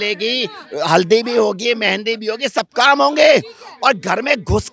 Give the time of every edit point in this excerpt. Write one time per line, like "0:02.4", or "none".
none